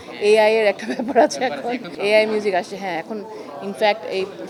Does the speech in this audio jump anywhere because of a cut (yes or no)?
no